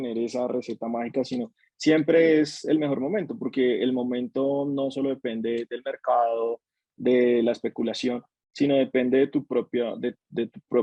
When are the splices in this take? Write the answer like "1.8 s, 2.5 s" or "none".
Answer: none

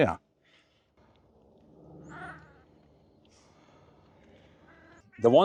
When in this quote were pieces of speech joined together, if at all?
none

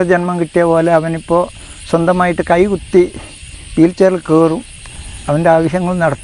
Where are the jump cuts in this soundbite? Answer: none

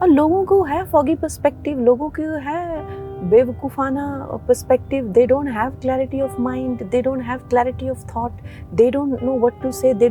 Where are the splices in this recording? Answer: none

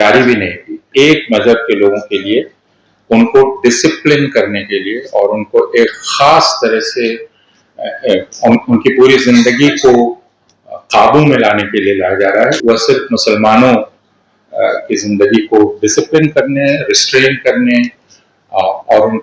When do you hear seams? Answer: 0.8 s, 12.6 s

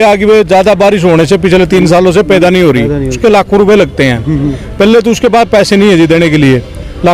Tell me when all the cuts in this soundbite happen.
3.2 s

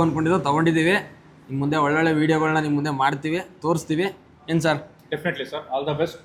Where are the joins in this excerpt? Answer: none

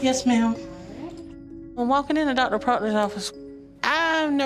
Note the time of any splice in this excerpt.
none

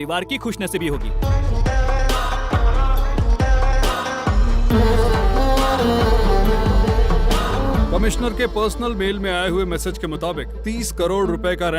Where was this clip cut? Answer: 1.1 s, 7.6 s

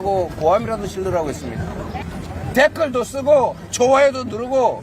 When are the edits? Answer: 2.0 s

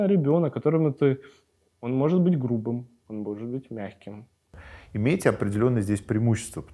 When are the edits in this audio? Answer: 4.5 s

